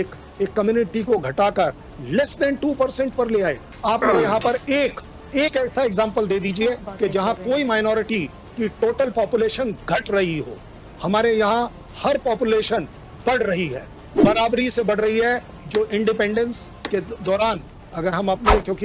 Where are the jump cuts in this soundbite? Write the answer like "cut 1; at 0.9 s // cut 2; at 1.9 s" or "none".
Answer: none